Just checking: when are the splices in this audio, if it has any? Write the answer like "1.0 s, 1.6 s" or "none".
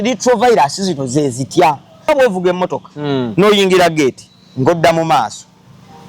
2.1 s